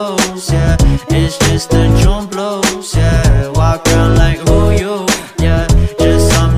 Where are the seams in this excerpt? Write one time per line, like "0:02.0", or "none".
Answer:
none

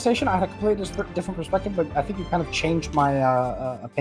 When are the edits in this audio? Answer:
none

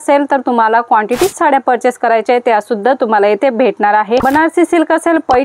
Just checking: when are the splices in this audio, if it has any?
0:04.2

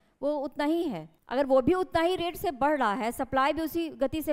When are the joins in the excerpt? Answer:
0:01.1

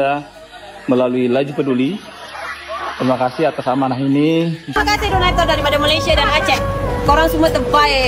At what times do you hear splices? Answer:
0:04.7

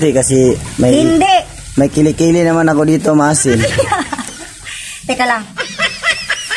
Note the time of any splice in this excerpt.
0:05.5

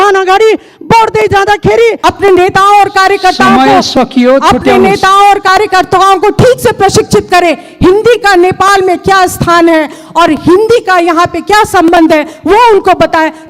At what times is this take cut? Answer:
0:02.0

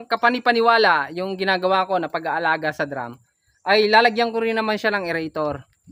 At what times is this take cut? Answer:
none

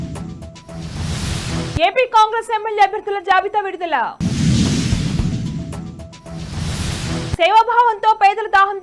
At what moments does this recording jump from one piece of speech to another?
0:01.6

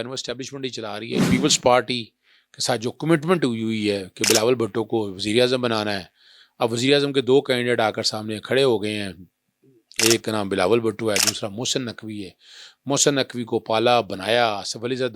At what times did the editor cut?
0:01.2

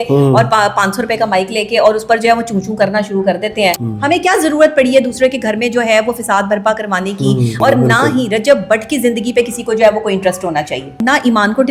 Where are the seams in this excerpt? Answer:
0:03.8
0:07.6
0:10.9

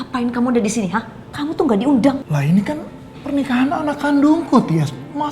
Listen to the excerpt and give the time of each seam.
0:01.2
0:02.2

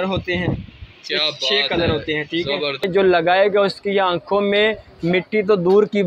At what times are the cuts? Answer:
0:02.8

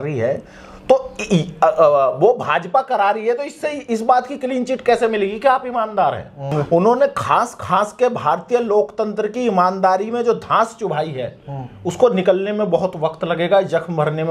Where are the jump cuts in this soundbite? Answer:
0:06.4

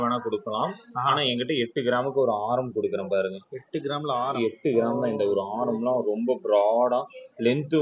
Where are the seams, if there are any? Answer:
none

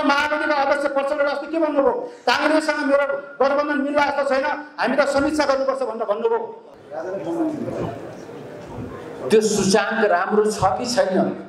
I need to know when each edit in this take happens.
0:06.6

